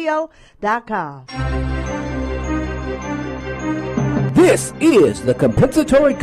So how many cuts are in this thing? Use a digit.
1